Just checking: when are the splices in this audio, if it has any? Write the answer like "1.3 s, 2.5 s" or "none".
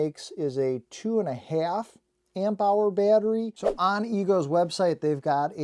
3.6 s

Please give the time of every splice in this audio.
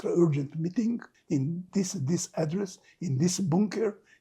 1.1 s

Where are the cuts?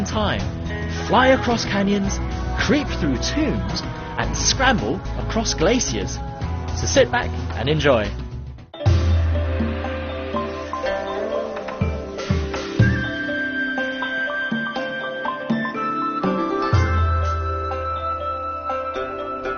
none

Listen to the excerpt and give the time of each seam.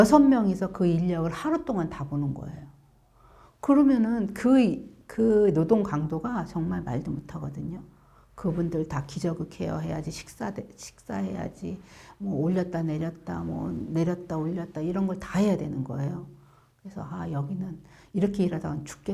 none

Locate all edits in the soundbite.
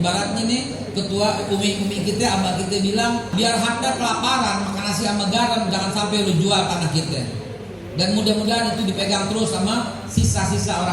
3.3 s

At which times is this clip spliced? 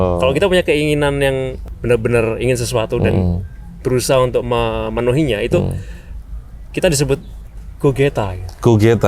1.6 s

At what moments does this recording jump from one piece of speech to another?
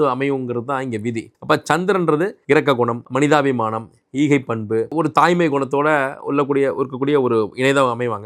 none

